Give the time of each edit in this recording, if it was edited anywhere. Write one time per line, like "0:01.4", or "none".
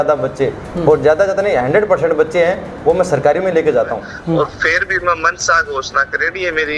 0:04.1

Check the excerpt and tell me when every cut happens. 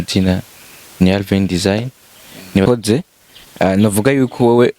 0:02.7

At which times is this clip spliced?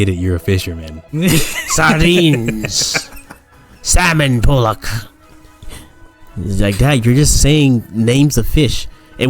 0:01.0

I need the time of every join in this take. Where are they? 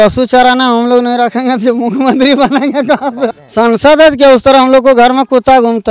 0:03.4

